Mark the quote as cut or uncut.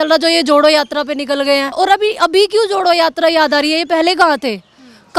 cut